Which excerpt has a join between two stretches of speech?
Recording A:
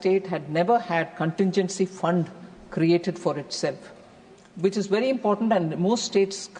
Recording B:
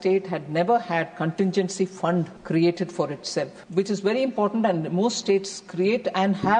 B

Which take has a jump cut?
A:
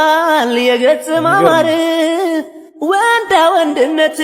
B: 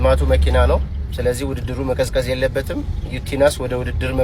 B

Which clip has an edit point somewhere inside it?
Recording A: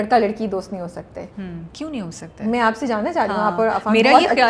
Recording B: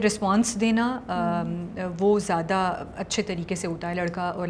A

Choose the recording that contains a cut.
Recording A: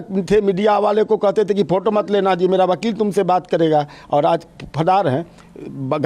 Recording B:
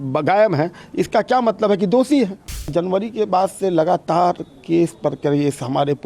B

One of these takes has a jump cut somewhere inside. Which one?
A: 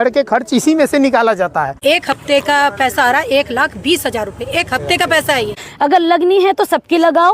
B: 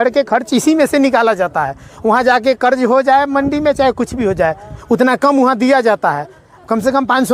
A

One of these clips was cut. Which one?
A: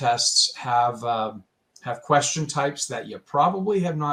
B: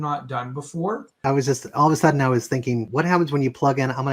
B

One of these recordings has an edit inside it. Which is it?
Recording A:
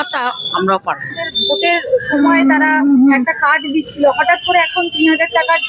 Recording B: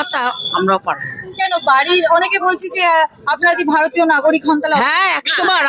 A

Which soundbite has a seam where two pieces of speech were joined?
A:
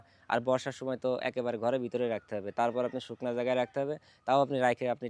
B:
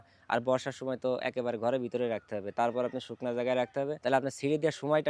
B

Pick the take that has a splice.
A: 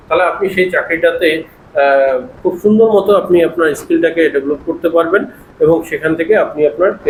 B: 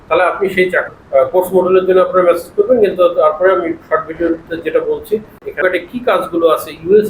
B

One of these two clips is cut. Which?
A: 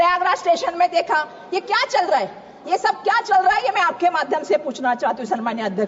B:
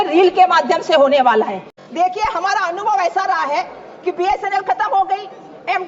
B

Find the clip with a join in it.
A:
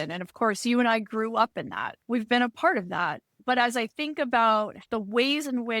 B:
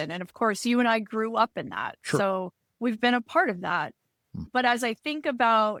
A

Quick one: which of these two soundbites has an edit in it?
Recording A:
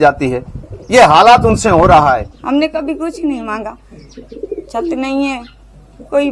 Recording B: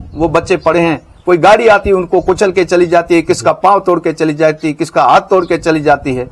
A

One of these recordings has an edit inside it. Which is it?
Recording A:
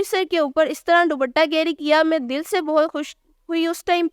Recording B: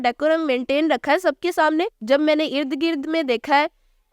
B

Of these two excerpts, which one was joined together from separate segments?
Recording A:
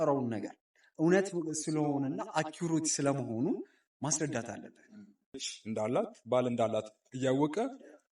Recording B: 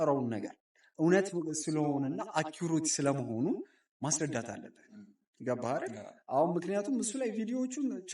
A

